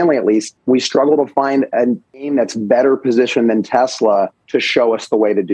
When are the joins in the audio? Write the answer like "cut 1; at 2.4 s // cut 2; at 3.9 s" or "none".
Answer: none